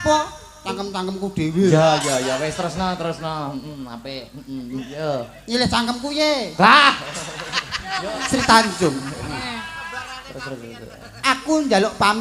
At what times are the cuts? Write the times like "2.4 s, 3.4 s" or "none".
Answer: 8.1 s